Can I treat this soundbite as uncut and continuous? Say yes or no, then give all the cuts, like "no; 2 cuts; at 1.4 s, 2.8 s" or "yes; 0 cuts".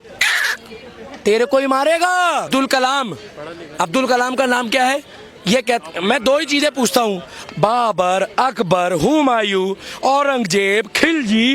no; 1 cut; at 2.5 s